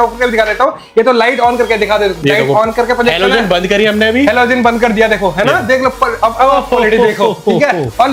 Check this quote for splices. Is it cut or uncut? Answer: uncut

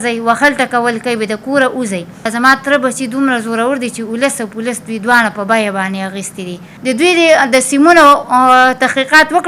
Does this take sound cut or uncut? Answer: cut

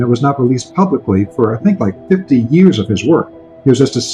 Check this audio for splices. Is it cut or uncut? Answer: uncut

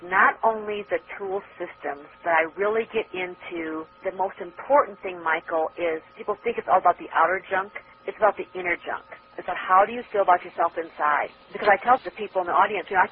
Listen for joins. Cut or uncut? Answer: cut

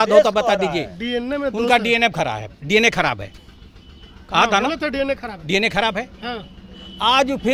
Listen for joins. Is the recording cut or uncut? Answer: uncut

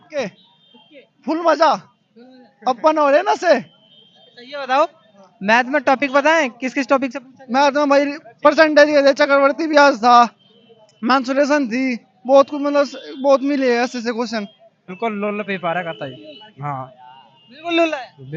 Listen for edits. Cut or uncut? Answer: cut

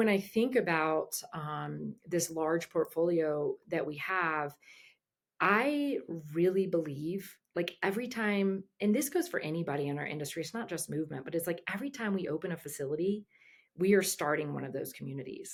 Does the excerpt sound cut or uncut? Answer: uncut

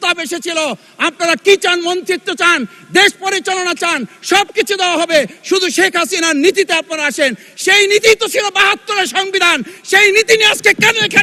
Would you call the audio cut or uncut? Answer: uncut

